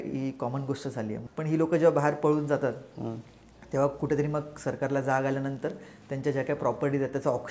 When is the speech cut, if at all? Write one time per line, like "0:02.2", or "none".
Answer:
0:01.2